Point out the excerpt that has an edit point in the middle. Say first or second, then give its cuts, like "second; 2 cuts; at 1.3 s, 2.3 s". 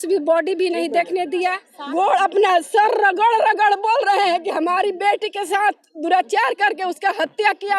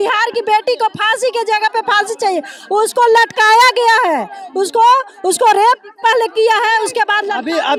first; 1 cut; at 1.7 s